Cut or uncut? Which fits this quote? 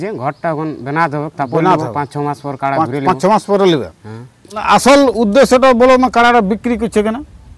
cut